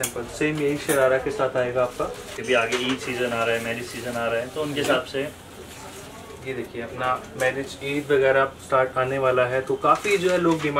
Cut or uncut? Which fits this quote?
cut